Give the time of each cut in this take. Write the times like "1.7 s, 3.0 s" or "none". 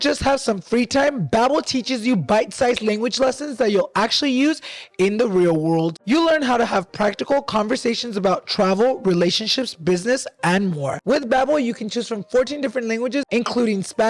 6.0 s, 10.9 s